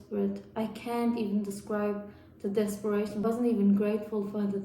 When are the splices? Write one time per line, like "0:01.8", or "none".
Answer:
0:03.2